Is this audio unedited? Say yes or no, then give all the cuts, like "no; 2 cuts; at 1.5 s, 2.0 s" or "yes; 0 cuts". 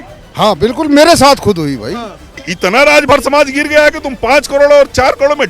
no; 1 cut; at 2.5 s